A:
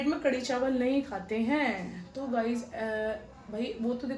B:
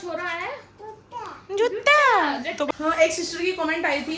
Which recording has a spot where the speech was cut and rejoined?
B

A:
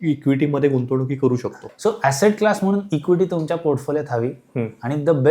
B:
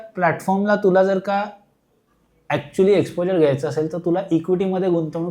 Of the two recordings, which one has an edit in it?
A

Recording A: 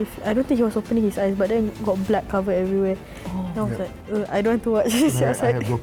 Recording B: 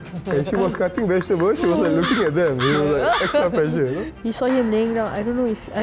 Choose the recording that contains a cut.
B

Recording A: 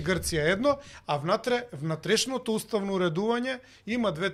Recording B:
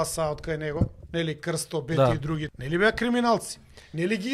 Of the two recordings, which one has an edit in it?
B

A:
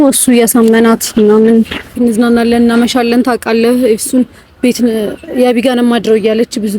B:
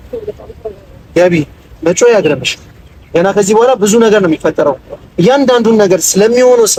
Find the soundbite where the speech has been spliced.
A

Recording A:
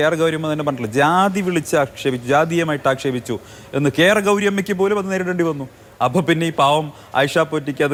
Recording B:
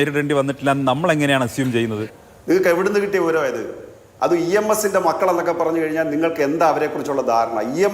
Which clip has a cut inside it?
B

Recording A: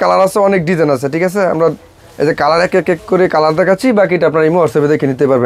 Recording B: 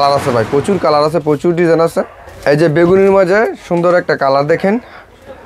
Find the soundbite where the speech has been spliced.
B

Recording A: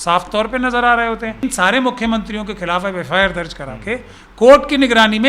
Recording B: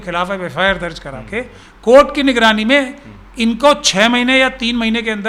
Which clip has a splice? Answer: A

